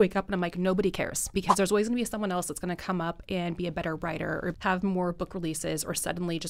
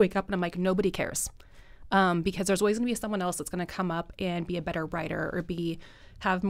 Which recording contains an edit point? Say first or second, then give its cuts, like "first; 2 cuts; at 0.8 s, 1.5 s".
first; 2 cuts; at 1.3 s, 4.6 s